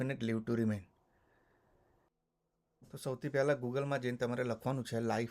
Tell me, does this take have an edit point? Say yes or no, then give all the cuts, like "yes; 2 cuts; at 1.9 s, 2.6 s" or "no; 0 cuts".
yes; 1 cut; at 2.1 s